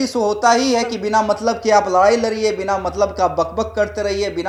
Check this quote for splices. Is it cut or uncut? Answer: uncut